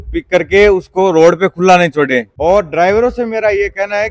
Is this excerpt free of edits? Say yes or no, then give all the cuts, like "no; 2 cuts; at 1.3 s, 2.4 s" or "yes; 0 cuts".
no; 1 cut; at 2.3 s